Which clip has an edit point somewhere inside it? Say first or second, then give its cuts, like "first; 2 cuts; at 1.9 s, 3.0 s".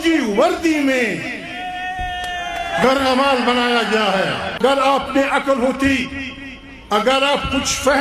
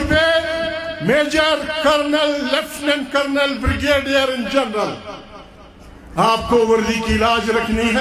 first; 1 cut; at 4.6 s